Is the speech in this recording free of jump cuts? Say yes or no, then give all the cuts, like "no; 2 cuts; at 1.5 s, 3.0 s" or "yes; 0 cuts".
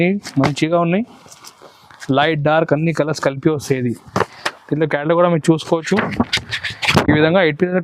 no; 1 cut; at 4.4 s